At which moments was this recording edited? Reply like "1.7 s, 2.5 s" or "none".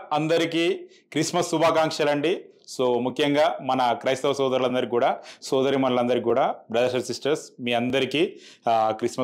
none

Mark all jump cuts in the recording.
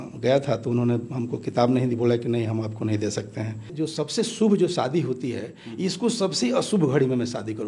3.7 s

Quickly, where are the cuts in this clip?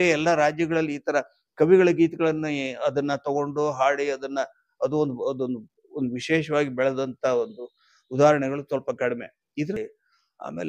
9.8 s

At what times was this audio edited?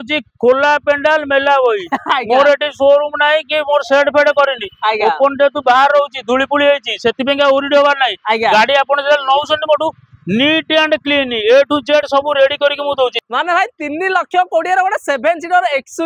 13.2 s

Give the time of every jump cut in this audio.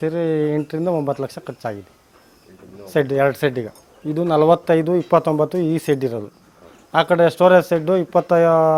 none

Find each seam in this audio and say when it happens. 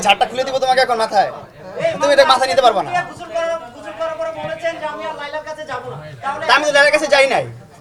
none

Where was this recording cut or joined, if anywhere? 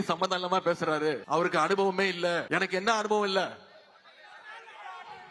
1.2 s, 2.4 s

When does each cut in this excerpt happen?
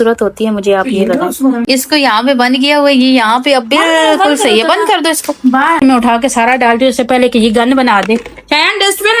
1.6 s, 5.8 s

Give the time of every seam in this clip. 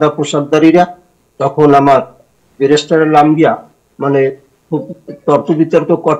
none

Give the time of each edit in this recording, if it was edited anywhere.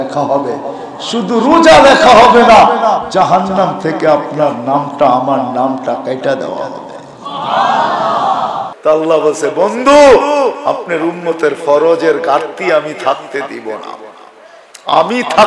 8.7 s

